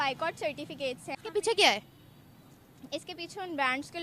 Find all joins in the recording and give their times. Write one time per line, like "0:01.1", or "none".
0:01.2